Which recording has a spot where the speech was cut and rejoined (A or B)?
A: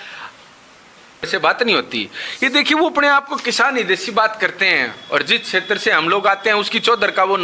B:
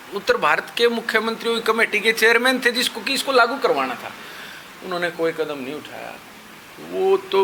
A